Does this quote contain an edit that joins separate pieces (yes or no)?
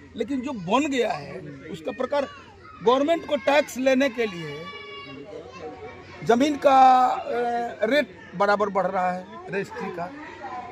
no